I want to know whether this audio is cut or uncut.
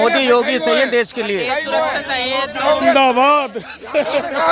uncut